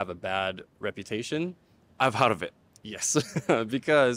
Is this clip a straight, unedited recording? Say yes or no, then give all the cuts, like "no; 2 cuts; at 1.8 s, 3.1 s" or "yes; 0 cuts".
yes; 0 cuts